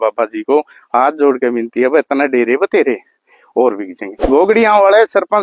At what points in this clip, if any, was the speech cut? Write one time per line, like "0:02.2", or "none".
0:04.1